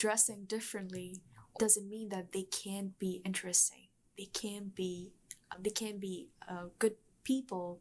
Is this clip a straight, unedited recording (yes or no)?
no